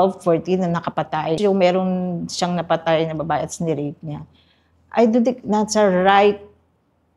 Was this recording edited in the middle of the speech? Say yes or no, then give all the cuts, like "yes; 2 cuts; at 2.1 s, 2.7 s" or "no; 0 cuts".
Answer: yes; 1 cut; at 1.4 s